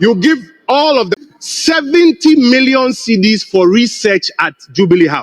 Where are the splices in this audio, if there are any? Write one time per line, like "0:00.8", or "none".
0:01.1